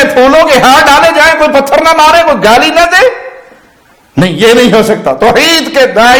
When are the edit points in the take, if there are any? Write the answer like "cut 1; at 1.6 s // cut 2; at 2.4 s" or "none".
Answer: none